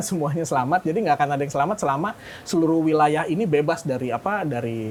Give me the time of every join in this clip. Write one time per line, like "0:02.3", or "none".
none